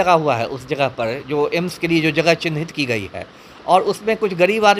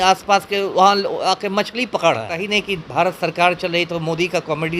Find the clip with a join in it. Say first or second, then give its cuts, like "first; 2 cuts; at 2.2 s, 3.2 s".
second; 1 cut; at 2.4 s